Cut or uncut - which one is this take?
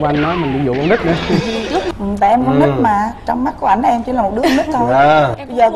cut